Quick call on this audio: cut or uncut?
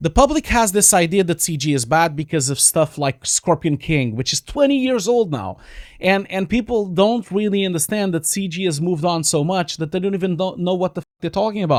uncut